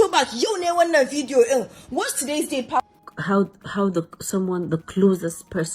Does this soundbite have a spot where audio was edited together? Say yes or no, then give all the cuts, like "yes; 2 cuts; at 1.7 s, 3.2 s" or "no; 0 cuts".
yes; 1 cut; at 3.1 s